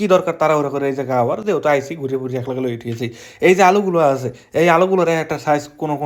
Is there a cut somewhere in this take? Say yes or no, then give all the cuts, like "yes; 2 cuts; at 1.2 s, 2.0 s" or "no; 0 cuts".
no; 0 cuts